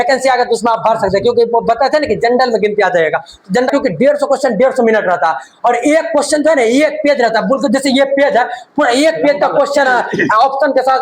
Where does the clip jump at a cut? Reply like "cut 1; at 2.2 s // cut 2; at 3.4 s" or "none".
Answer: cut 1; at 3.7 s